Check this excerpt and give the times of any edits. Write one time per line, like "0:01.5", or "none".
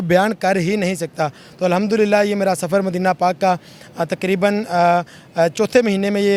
none

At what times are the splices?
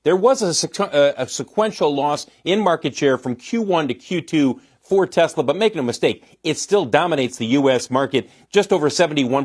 none

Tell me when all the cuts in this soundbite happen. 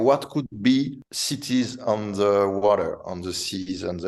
none

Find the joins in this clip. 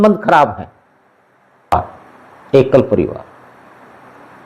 0:01.7

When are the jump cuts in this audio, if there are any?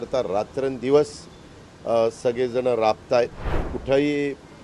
0:03.7

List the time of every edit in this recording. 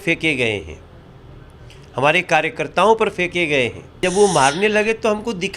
0:03.9

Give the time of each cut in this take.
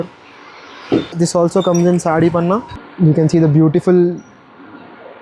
0:02.8

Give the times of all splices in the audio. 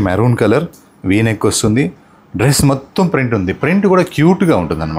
none

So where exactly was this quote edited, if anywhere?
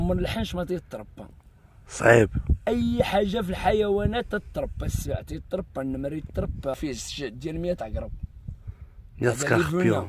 0:06.8

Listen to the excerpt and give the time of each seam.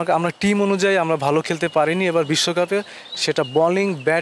none

